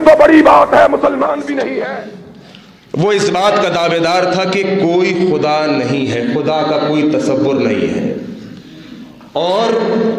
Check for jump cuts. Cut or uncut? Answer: cut